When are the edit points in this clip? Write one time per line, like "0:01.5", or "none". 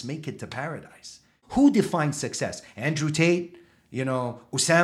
0:01.4